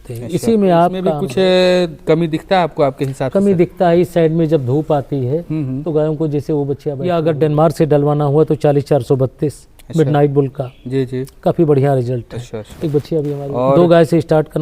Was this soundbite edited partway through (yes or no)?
yes